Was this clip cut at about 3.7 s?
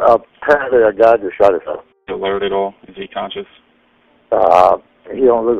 no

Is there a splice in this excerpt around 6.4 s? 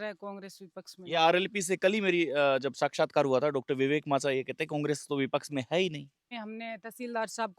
yes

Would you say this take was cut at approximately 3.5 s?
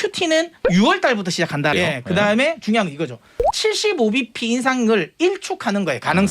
no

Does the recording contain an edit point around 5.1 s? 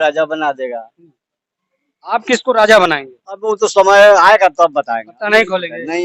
no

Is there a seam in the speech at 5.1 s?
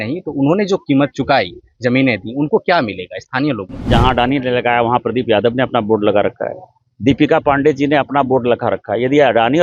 no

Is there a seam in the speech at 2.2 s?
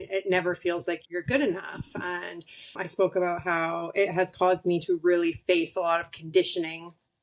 no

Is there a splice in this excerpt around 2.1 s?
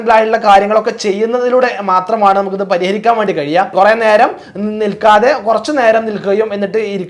no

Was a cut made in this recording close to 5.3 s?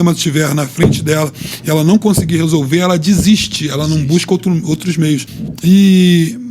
yes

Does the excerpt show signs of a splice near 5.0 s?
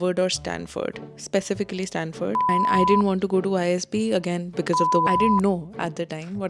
yes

